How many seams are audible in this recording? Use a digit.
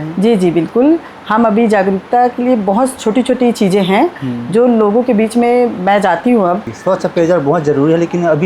1